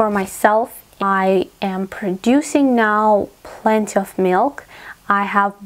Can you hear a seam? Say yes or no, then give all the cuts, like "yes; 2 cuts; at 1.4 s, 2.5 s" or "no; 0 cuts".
yes; 1 cut; at 1.0 s